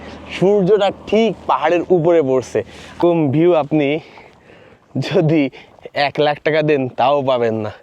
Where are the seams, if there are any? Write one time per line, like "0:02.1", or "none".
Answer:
0:02.9